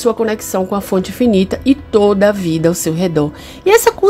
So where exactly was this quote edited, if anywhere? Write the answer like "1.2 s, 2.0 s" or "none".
none